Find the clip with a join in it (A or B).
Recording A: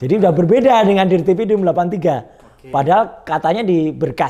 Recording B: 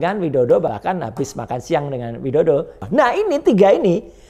B